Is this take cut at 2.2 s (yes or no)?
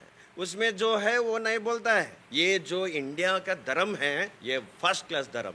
yes